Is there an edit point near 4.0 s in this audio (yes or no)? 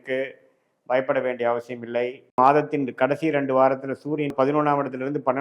no